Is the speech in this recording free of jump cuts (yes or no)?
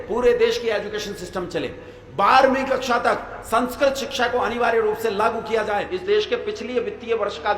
no